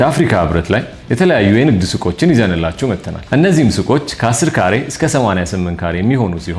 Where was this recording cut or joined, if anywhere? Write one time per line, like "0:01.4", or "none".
0:01.0
0:03.1